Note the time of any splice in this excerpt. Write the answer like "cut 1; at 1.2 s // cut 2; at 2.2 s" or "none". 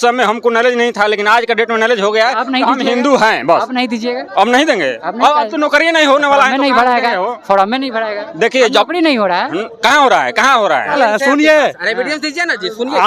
cut 1; at 11.0 s

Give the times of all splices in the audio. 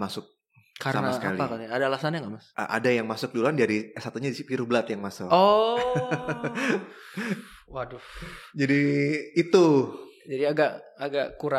none

